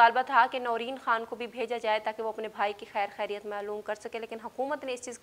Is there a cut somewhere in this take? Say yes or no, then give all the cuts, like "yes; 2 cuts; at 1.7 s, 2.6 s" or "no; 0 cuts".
no; 0 cuts